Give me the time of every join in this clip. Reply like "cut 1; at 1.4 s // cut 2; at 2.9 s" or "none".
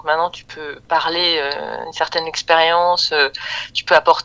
none